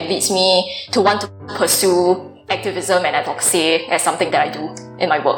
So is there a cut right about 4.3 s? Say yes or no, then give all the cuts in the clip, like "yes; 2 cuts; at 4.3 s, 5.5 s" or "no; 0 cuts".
yes; 1 cut; at 4.3 s